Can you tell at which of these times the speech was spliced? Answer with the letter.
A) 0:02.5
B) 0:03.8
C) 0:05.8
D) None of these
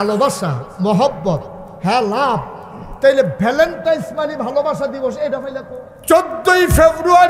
C